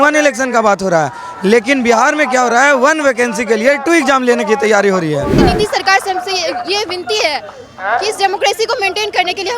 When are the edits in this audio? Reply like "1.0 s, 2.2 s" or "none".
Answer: 5.4 s